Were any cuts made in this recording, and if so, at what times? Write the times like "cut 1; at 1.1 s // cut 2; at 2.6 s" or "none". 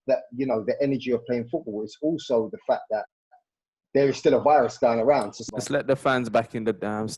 cut 1; at 5.4 s